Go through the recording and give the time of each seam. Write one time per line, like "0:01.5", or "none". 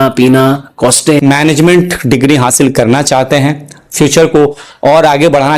0:01.2